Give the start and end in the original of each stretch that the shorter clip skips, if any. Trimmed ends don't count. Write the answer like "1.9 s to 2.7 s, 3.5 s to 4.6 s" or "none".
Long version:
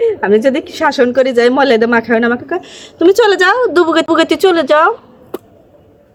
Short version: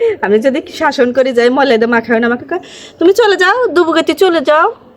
4.0 s to 4.2 s